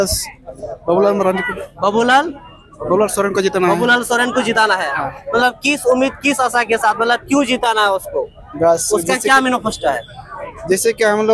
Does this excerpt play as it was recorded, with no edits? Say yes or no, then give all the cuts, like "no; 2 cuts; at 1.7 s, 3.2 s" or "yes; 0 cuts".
yes; 0 cuts